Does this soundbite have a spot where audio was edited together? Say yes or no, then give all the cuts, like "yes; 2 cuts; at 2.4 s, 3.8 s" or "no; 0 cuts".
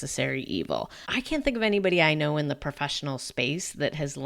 yes; 1 cut; at 1.0 s